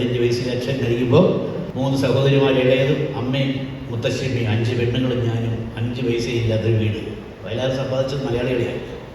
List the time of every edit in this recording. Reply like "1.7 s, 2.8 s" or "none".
1.6 s